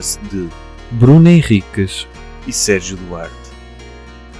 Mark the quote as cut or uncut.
cut